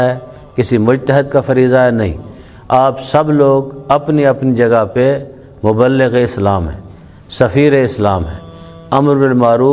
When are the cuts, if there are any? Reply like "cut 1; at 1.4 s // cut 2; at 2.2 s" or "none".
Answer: none